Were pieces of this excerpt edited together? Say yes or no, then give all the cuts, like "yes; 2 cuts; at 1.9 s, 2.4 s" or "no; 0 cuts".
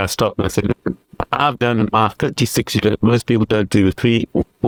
no; 0 cuts